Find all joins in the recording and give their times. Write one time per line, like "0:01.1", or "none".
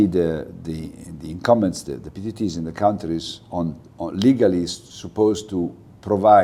none